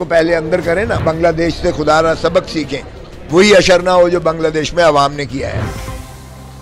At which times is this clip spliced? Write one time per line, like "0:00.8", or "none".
0:01.0
0:05.6